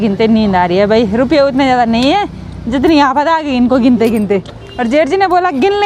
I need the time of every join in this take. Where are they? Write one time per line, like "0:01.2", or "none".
none